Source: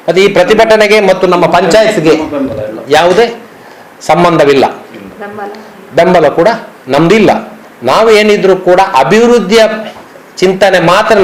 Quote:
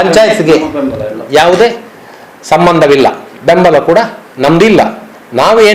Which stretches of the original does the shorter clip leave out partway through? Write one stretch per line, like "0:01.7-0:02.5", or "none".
0:04.9-0:05.8